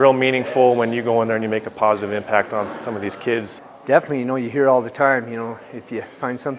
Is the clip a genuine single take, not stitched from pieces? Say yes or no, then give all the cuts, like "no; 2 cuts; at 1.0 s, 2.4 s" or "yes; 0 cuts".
no; 1 cut; at 3.5 s